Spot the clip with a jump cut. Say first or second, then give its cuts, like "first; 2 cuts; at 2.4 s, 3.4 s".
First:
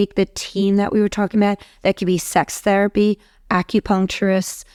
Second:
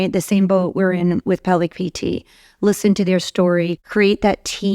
second; 1 cut; at 3.8 s